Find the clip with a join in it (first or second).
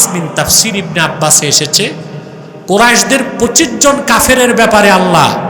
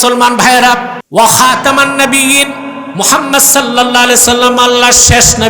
second